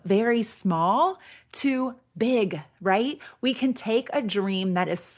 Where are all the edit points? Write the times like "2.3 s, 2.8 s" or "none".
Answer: none